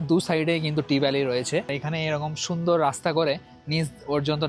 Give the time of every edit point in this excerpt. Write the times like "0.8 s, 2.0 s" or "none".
1.8 s